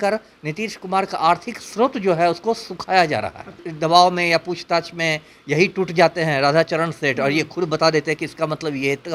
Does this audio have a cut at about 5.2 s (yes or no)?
no